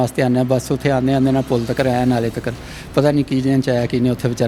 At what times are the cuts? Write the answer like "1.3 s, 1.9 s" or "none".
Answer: none